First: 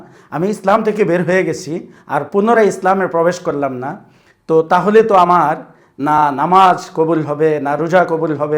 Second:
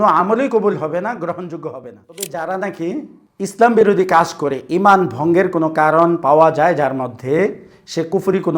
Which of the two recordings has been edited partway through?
second; 1 cut; at 2.2 s

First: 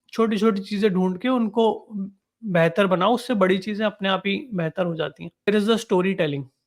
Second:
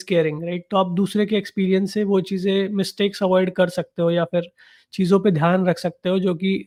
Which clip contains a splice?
first; 1 cut; at 5.5 s

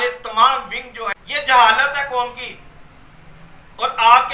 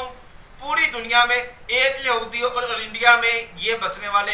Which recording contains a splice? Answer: first; 1 cut; at 1.2 s

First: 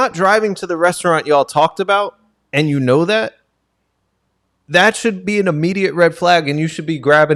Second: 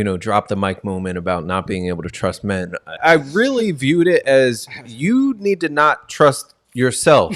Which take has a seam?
second; 1 cut; at 3.0 s

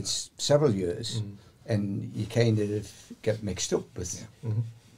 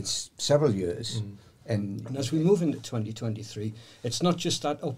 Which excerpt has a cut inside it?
second; 1 cut; at 2.0 s

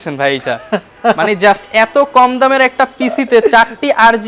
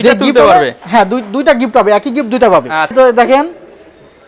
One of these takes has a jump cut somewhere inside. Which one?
second; 1 cut; at 2.9 s

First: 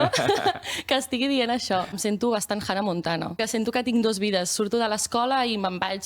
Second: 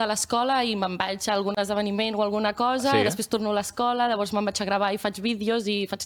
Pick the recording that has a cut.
first; 2 cuts; at 2.0 s, 3.4 s

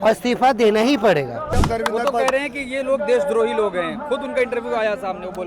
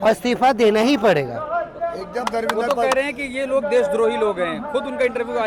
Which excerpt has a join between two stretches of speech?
first; 1 cut; at 1.4 s

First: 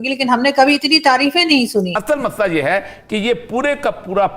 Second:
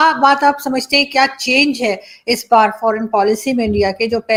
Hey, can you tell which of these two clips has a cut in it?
first; 1 cut; at 1.9 s

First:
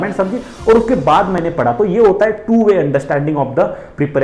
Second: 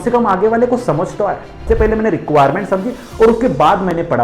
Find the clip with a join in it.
second; 1 cut; at 1.6 s

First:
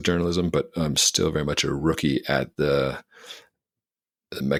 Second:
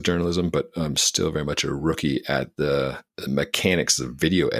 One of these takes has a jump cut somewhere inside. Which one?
second; 1 cut; at 3.1 s

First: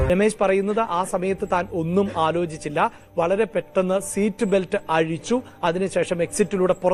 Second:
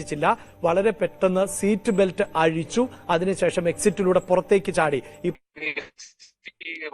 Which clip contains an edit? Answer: second; 1 cut; at 5.3 s

